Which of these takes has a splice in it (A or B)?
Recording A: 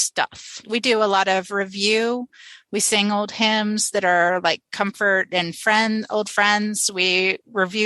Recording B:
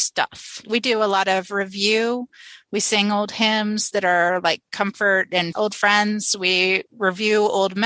B